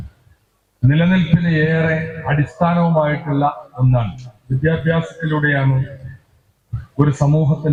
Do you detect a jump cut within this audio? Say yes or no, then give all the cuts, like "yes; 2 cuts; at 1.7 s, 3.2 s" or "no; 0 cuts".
no; 0 cuts